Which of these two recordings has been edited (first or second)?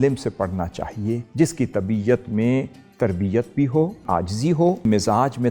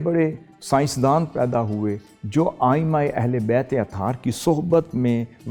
first